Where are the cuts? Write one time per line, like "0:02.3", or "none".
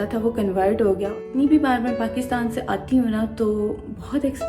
0:01.2